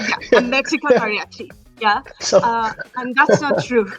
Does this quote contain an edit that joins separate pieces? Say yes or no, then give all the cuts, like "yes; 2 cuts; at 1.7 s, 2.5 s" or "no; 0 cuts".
no; 0 cuts